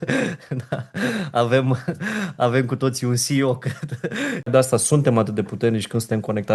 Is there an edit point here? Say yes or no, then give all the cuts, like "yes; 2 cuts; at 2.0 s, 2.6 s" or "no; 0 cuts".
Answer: yes; 1 cut; at 4.5 s